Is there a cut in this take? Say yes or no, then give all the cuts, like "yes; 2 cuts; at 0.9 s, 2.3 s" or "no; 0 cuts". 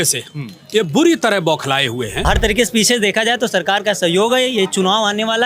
yes; 1 cut; at 2.1 s